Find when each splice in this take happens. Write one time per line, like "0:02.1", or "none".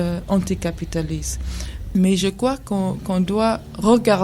none